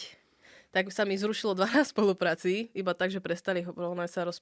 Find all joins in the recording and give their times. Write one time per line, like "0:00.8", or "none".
none